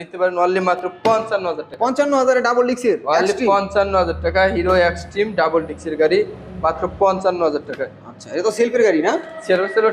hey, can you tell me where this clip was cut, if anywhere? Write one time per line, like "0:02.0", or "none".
none